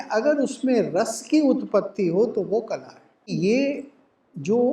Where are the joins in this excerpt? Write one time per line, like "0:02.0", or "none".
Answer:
0:03.3